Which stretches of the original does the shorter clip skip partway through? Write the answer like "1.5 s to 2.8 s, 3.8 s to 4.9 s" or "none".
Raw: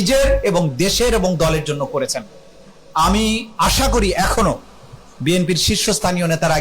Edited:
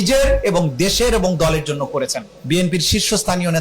2.3 s to 5.0 s